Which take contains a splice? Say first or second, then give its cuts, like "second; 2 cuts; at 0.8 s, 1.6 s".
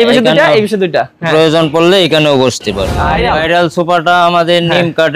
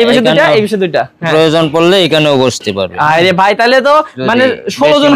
first; 1 cut; at 3.1 s